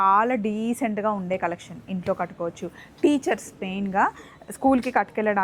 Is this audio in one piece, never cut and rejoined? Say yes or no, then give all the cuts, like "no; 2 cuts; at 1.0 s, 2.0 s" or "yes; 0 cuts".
yes; 0 cuts